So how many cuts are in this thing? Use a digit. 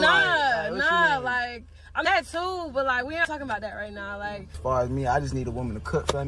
1